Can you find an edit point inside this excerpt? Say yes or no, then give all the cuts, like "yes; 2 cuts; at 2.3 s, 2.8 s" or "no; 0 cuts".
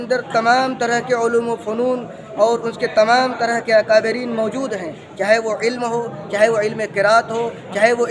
no; 0 cuts